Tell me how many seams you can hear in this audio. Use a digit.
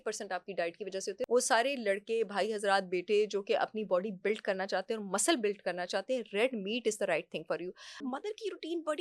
2